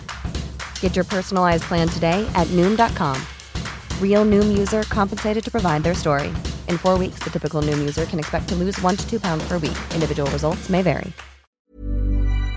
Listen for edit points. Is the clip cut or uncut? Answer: cut